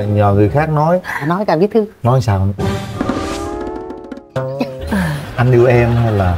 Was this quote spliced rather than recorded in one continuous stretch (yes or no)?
no